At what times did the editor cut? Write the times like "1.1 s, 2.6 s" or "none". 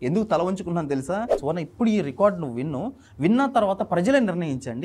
1.4 s